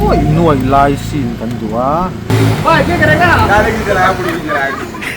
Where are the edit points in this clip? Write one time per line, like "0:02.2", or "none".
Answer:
0:02.3